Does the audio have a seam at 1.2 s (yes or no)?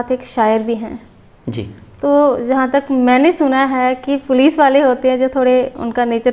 no